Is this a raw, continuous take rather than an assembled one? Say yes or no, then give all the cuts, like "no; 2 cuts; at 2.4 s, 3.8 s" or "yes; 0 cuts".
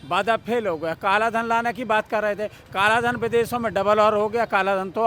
yes; 0 cuts